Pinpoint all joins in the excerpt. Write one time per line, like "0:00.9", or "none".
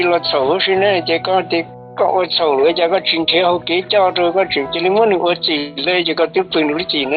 0:01.8